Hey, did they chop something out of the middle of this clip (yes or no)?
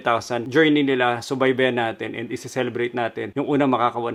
no